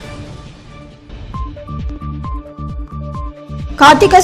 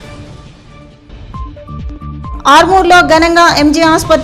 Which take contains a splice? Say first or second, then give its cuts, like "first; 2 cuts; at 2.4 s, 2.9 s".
second; 1 cut; at 2.1 s